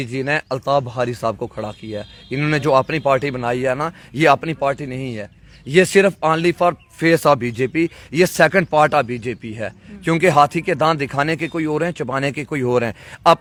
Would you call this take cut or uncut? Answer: uncut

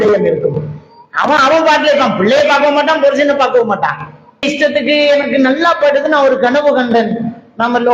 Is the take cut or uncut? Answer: cut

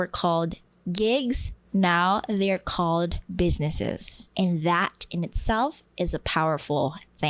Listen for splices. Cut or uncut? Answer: cut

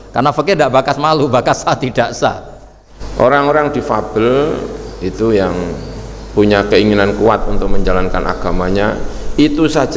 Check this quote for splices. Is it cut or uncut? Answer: cut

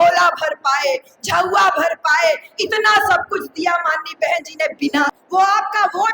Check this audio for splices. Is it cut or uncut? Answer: cut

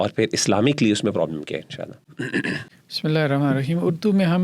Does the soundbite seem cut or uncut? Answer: uncut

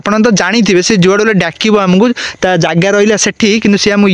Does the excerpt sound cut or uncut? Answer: uncut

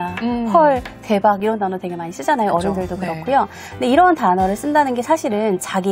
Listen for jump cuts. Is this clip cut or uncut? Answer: uncut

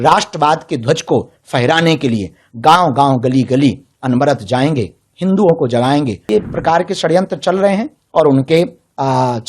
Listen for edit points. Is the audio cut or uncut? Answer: cut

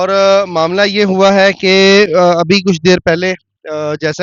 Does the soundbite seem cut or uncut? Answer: uncut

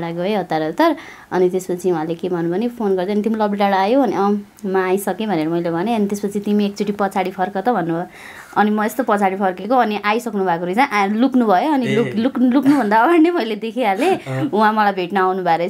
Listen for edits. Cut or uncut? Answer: uncut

